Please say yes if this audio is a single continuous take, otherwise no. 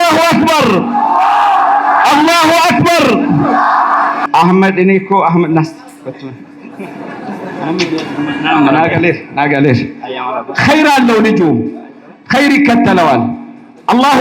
no